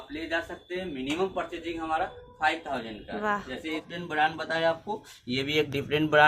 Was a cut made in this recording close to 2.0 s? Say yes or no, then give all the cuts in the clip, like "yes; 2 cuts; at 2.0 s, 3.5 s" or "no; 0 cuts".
no; 1 cut; at 3.9 s